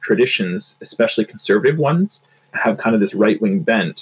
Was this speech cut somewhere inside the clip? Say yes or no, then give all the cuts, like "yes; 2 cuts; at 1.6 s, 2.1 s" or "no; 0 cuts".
yes; 1 cut; at 2.5 s